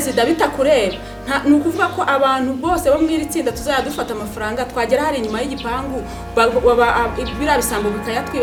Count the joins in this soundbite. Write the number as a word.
zero